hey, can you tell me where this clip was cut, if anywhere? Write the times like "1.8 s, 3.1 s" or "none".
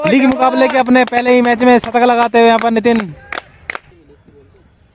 3.9 s